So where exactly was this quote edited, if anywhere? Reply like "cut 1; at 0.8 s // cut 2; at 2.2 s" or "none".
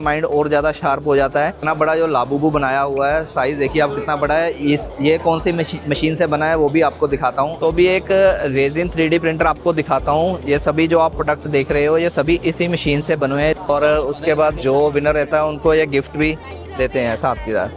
cut 1; at 1.6 s // cut 2; at 7.5 s // cut 3; at 13.6 s